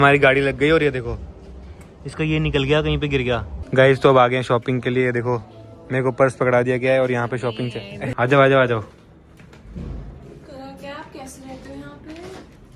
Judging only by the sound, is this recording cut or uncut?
cut